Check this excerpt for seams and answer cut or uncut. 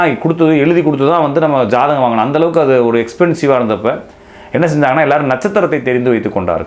uncut